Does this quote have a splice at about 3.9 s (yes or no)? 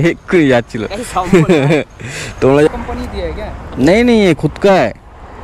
no